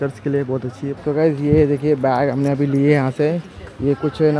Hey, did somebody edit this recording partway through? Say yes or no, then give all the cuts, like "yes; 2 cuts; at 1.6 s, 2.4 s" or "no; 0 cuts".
yes; 1 cut; at 1.0 s